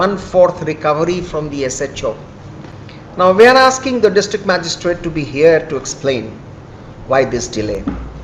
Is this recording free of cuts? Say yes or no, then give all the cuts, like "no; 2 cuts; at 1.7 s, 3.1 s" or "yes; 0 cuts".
yes; 0 cuts